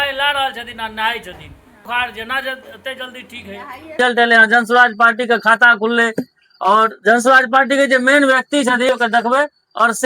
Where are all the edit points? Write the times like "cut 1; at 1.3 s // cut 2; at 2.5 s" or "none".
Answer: cut 1; at 1.9 s // cut 2; at 3.9 s // cut 3; at 8.9 s